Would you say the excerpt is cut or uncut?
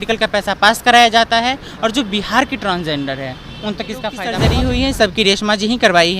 cut